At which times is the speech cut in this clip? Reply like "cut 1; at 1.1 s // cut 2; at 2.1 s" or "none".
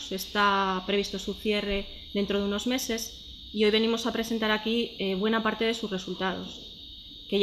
cut 1; at 3.8 s